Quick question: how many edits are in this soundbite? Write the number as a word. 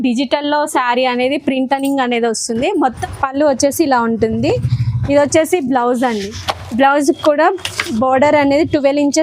one